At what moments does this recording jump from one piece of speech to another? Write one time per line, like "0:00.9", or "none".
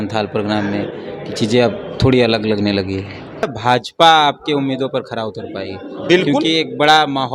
0:03.5